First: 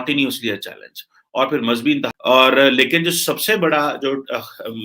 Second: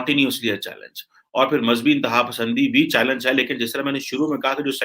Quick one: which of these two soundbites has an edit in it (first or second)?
first